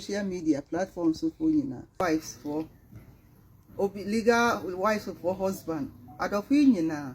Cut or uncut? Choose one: cut